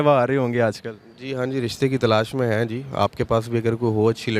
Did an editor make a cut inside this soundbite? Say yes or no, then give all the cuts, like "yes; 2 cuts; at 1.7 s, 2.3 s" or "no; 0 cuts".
no; 0 cuts